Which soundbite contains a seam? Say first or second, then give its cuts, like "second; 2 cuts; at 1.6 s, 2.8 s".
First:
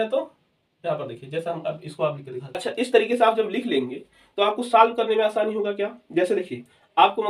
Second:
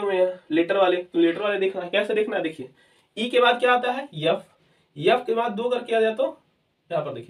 first; 1 cut; at 2.6 s